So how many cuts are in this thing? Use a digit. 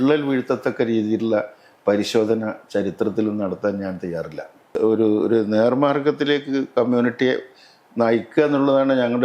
1